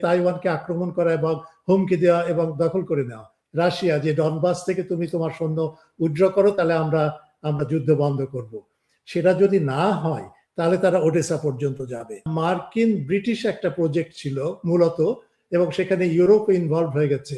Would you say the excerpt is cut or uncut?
cut